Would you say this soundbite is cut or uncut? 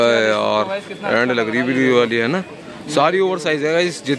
uncut